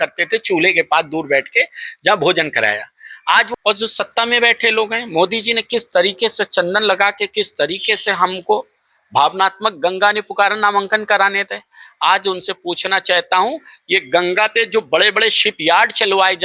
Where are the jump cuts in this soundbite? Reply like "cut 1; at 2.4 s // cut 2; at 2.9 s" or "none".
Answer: cut 1; at 3.5 s